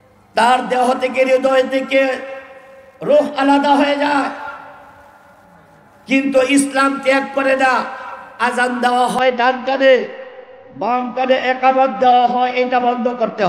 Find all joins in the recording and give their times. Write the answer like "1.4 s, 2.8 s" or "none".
8.4 s